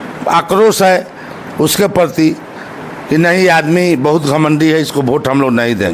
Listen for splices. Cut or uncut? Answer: uncut